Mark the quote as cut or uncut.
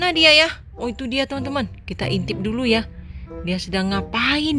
uncut